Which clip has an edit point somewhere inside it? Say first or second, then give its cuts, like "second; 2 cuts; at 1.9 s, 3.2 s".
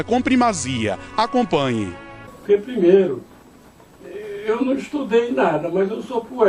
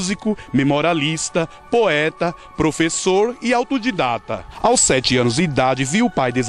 second; 1 cut; at 4.2 s